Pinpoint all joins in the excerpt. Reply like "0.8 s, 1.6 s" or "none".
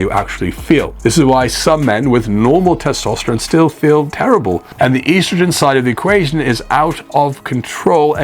none